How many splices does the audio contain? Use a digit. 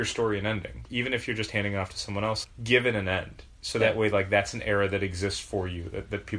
2